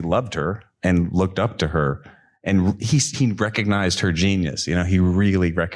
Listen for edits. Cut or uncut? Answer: uncut